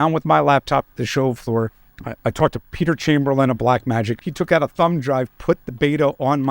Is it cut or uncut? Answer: cut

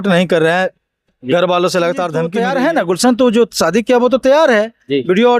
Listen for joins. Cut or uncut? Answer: cut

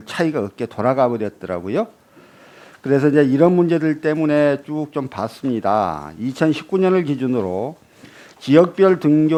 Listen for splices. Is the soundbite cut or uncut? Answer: uncut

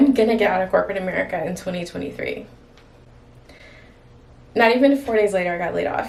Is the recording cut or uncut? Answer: uncut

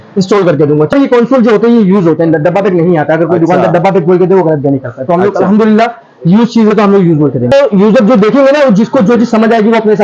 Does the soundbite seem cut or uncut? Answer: cut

